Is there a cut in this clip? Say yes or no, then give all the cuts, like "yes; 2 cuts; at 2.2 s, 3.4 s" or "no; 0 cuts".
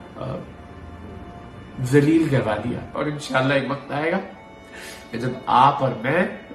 yes; 1 cut; at 2.9 s